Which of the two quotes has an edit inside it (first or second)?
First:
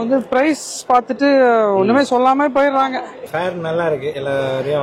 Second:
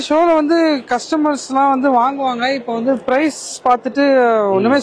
first